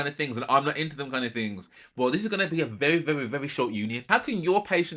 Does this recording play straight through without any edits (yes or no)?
no